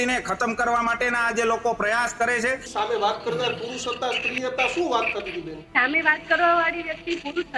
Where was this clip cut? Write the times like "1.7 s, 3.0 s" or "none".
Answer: 2.7 s, 5.6 s